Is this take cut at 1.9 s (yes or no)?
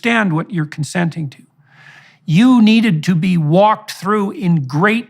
yes